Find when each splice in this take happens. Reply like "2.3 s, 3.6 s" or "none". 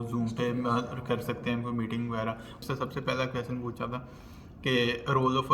2.6 s